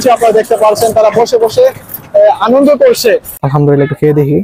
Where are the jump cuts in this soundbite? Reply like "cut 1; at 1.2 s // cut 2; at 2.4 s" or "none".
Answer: cut 1; at 3.4 s